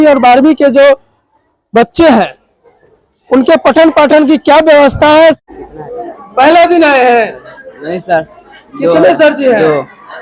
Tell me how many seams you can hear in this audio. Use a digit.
1